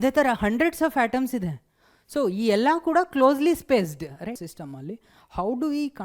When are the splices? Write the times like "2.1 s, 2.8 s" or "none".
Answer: 4.5 s